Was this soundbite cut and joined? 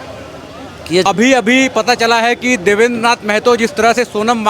yes; 1 cut; at 1.0 s

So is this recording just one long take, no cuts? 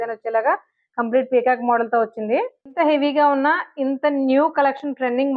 no; 1 cut; at 2.8 s

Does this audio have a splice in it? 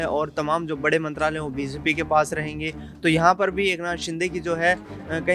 no; 0 cuts

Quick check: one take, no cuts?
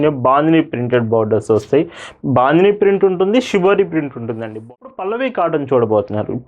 no; 1 cut; at 4.6 s

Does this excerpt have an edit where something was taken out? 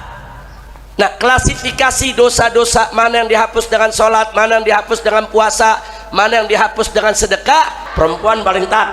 yes; 1 cut; at 7.9 s

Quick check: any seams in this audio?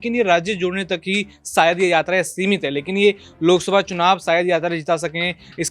no; 0 cuts

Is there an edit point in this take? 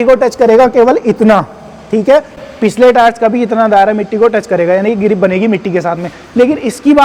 no; 0 cuts

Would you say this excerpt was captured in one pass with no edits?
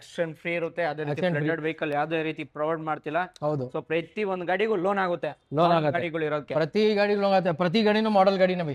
yes; 0 cuts

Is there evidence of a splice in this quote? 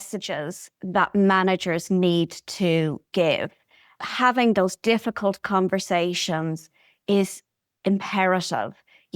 yes; 1 cut; at 4.0 s

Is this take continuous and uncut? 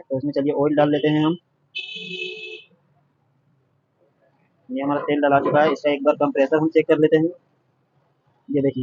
yes; 0 cuts

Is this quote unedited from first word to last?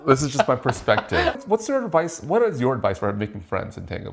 no; 1 cut; at 1.4 s

